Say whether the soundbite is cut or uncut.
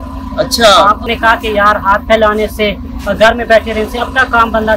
cut